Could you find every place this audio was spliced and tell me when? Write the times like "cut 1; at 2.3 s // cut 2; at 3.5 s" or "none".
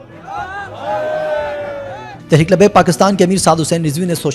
none